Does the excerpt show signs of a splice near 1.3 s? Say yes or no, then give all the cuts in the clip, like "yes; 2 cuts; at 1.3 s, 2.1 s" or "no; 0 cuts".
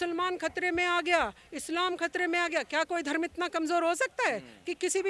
no; 0 cuts